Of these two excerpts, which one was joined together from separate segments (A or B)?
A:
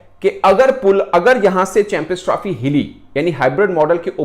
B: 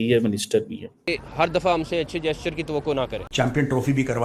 B